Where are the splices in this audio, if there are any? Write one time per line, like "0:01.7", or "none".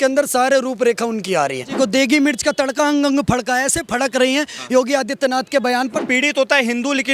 0:01.7
0:06.0